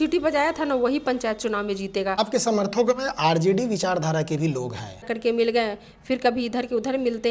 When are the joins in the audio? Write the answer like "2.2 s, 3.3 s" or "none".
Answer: 2.2 s, 5.1 s